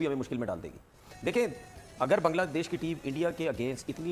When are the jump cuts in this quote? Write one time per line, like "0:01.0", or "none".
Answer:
none